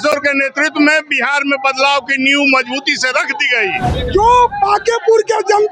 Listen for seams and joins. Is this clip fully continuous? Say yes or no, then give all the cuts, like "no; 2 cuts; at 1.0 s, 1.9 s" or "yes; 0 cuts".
no; 1 cut; at 3.9 s